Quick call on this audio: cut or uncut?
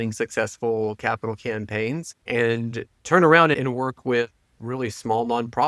cut